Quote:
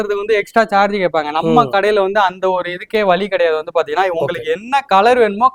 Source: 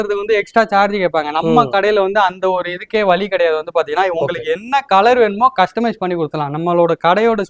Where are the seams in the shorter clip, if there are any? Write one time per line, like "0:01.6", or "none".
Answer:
none